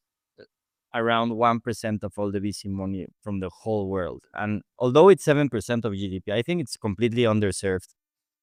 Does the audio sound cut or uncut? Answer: uncut